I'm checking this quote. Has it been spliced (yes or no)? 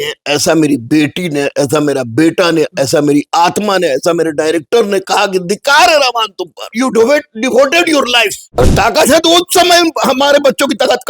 yes